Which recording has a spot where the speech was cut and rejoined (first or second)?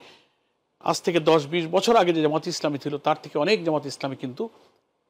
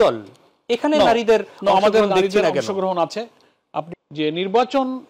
second